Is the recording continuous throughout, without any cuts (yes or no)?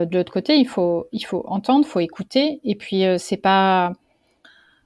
yes